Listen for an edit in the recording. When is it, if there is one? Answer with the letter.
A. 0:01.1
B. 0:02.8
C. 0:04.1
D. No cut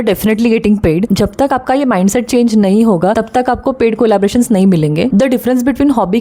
A